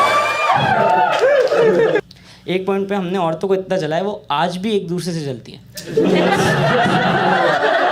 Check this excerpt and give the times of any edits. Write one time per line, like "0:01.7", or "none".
0:02.0